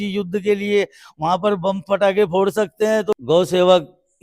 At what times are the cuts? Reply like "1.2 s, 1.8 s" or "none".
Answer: 3.1 s